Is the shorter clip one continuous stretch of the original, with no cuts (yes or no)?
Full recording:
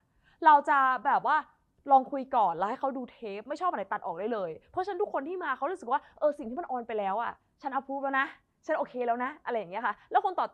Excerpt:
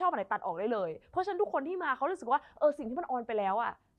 yes